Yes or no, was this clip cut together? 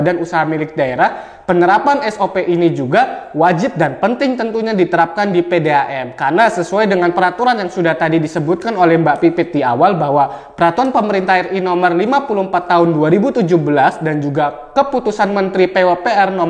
no